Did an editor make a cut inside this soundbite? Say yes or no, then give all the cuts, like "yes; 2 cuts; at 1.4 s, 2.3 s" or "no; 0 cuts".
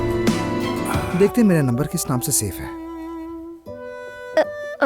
yes; 1 cut; at 1.0 s